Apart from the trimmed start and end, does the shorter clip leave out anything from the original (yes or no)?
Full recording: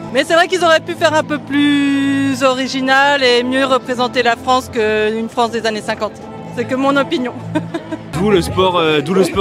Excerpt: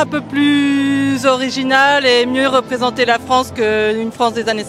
no